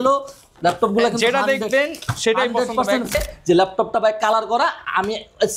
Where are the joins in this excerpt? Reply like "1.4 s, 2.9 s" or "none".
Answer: 3.1 s